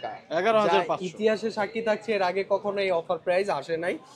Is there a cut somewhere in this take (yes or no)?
no